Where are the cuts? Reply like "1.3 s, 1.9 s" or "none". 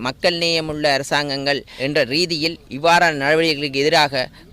1.7 s